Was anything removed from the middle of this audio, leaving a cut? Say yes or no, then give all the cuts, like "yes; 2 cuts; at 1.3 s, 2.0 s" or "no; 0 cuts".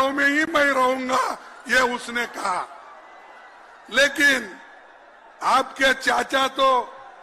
no; 0 cuts